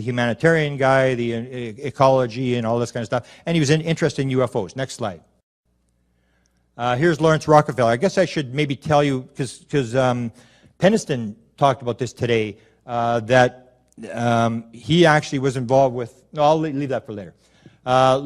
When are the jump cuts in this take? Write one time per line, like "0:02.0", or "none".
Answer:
0:06.0

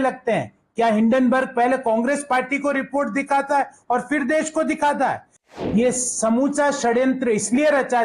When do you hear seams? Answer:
0:05.6

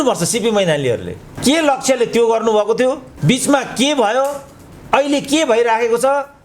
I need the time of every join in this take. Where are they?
0:03.1

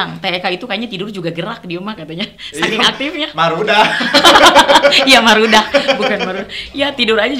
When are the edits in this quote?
none

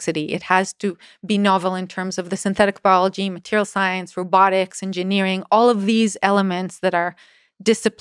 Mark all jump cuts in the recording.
none

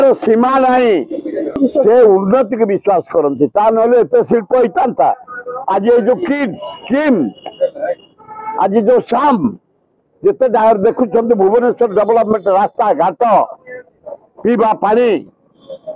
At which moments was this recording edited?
0:01.6

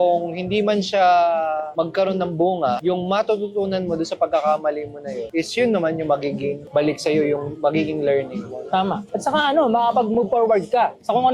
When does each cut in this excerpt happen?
none

